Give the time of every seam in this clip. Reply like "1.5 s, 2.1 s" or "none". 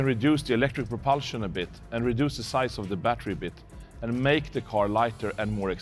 none